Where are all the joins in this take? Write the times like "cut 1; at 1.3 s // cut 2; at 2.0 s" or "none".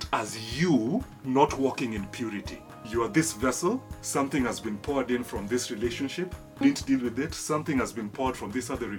cut 1; at 1.1 s // cut 2; at 2.8 s // cut 3; at 4.0 s // cut 4; at 6.6 s